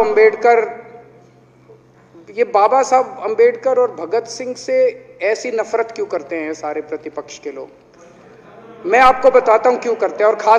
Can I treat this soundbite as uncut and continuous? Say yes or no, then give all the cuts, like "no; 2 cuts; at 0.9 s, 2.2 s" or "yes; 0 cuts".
yes; 0 cuts